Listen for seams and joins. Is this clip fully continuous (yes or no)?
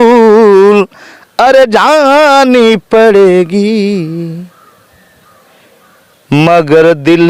yes